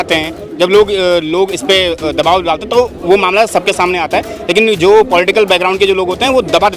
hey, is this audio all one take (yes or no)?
yes